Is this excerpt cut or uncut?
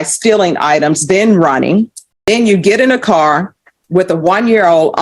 cut